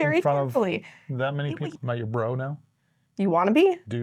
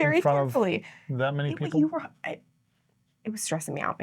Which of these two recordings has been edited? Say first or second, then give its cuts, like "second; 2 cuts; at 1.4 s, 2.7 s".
first; 1 cut; at 1.7 s